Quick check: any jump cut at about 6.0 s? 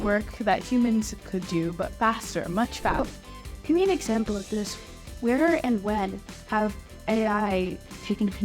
no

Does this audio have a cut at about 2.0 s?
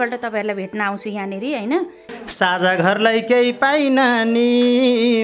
yes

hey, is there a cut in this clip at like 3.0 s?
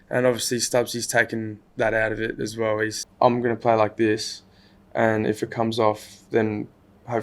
yes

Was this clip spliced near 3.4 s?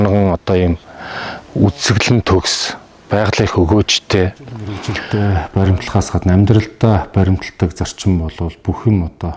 no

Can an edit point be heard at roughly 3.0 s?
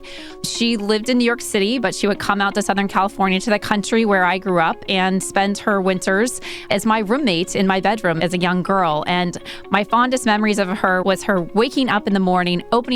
no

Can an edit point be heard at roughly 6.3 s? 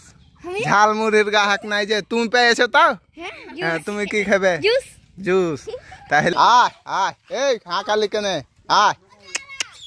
yes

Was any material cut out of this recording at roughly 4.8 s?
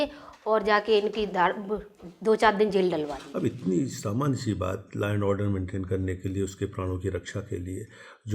no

